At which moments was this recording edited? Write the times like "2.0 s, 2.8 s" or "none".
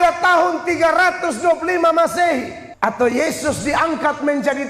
2.6 s